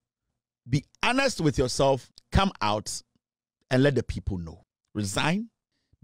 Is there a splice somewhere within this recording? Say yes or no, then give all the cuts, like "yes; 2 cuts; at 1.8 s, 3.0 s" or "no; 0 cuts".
yes; 1 cut; at 2.2 s